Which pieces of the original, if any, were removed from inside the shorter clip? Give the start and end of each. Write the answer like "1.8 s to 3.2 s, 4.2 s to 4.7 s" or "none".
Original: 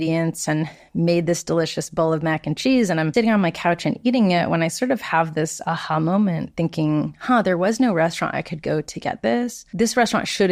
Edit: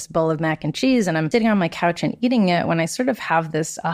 none